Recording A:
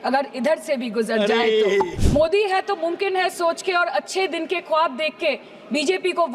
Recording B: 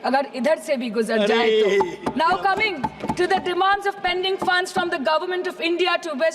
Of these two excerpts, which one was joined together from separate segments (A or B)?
A